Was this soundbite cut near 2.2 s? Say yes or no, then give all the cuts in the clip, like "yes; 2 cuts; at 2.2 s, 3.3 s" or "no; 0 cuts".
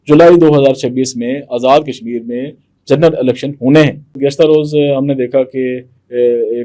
no; 1 cut; at 4.2 s